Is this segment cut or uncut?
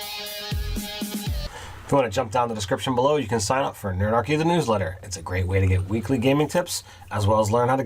cut